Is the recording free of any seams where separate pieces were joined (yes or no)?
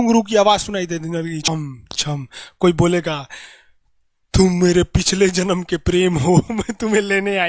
no